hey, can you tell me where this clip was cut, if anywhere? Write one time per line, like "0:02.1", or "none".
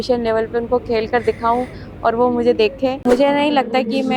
0:03.0